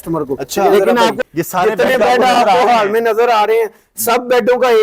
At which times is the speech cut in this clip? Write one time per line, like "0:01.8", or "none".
0:01.2

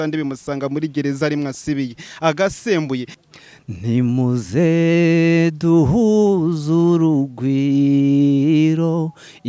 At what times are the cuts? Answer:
0:03.1

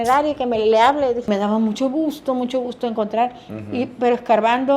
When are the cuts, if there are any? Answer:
0:01.3

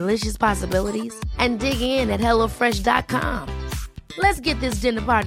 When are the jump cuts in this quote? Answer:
none

